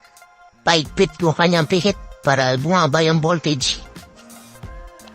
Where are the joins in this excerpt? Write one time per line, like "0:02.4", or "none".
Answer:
0:03.6